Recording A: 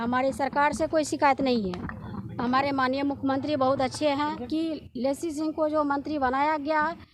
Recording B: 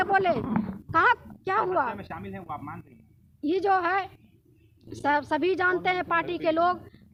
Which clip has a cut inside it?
A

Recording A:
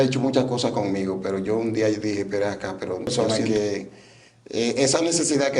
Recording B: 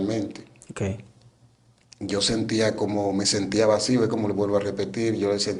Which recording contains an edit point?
A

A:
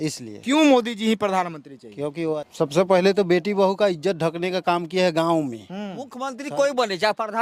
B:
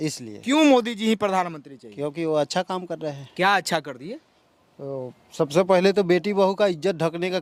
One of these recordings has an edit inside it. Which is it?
A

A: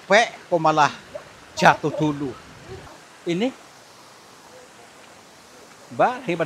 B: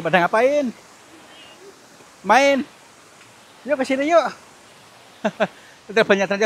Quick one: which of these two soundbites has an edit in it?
A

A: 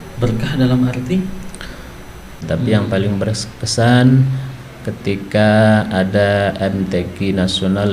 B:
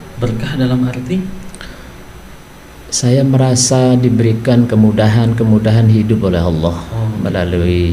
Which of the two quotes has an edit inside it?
A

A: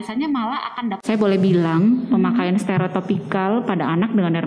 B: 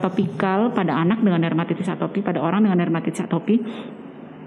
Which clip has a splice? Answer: A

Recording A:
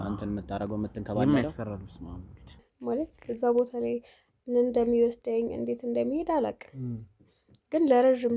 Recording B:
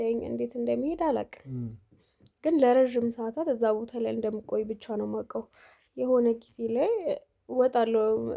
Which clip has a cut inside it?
A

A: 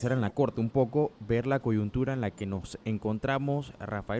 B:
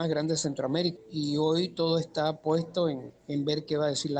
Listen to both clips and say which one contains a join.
B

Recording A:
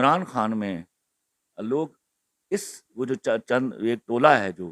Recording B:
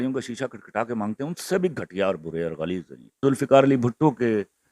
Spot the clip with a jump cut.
B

